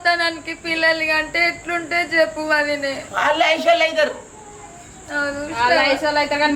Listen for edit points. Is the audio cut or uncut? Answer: uncut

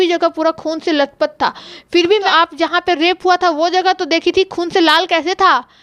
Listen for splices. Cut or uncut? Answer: cut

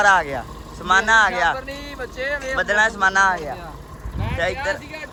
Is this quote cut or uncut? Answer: uncut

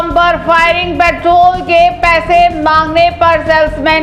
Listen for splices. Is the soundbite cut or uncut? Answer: uncut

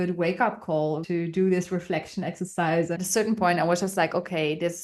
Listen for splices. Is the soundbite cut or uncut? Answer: cut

